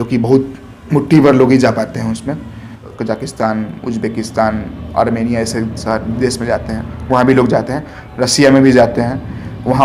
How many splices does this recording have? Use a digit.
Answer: 1